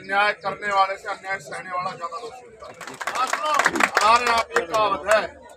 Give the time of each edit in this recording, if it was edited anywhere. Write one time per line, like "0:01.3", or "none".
0:03.2